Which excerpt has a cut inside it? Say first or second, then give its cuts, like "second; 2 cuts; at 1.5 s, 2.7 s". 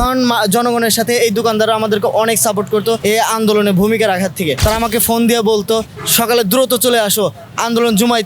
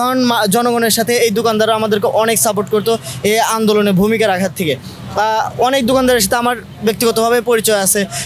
first; 2 cuts; at 3.0 s, 4.6 s